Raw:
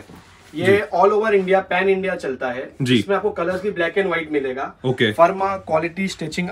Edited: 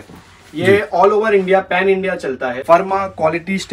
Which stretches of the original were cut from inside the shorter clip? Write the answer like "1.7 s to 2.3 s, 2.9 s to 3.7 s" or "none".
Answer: 2.6 s to 5.1 s